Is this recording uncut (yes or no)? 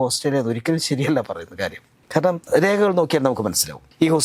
yes